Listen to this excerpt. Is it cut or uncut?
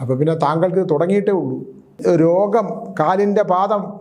cut